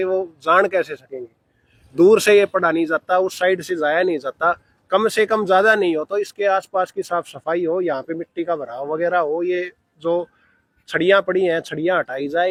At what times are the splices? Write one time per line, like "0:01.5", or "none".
none